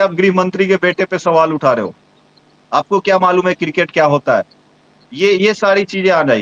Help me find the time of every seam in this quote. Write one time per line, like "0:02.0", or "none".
none